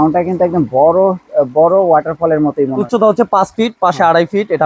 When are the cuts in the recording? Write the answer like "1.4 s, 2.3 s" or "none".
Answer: 2.9 s